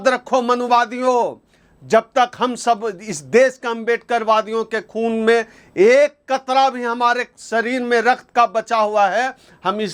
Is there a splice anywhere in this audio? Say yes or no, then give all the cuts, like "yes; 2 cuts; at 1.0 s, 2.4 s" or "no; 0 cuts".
no; 0 cuts